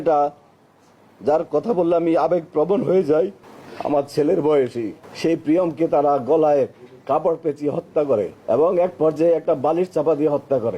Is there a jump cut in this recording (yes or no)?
yes